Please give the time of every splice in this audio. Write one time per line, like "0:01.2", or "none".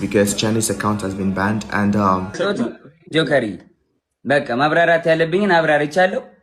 0:02.4